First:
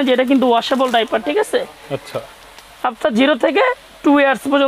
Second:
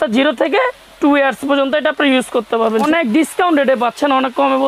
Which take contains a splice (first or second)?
second